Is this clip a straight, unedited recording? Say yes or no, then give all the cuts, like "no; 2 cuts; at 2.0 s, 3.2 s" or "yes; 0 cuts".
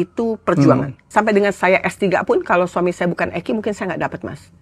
no; 1 cut; at 1.0 s